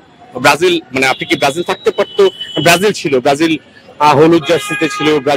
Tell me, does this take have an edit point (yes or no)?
no